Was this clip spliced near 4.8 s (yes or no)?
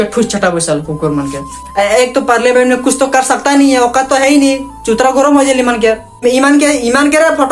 no